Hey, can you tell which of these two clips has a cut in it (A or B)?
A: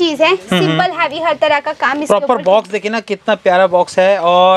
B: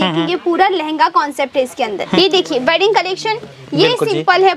B